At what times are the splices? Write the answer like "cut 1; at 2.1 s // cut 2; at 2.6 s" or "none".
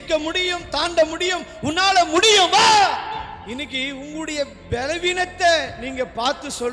cut 1; at 3.4 s

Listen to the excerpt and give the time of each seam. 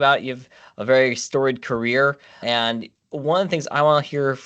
cut 1; at 2.4 s

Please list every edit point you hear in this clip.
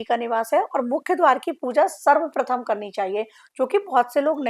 none

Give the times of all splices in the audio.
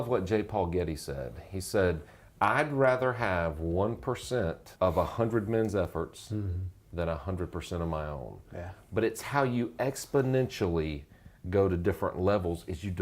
cut 1; at 4.6 s

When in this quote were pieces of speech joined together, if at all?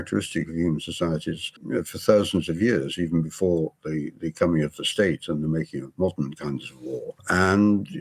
cut 1; at 1.5 s // cut 2; at 7.2 s

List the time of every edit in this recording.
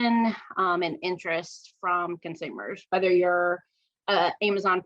none

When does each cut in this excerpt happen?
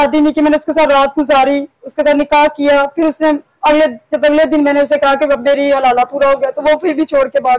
none

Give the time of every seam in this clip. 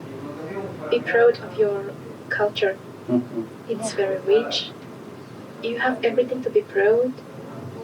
none

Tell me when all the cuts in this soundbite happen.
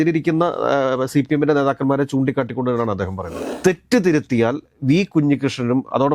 cut 1; at 3.4 s

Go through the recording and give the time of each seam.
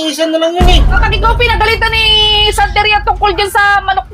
cut 1; at 1.0 s

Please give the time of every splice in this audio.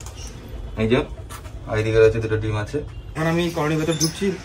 cut 1; at 3.0 s

